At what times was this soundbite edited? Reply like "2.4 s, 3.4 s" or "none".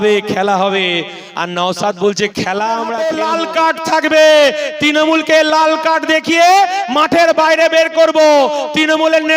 3.0 s

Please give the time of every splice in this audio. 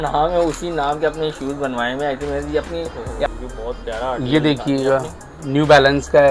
3.3 s

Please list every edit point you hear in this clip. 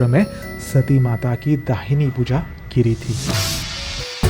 3.2 s

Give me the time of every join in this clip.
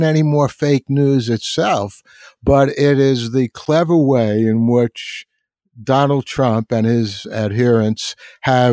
none

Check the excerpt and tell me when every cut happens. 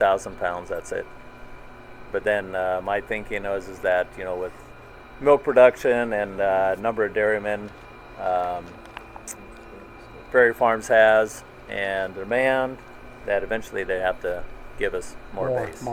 none

